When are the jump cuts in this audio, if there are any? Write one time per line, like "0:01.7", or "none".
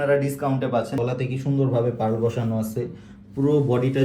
0:01.0